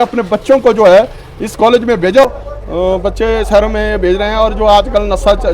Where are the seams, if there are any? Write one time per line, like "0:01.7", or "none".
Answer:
0:02.2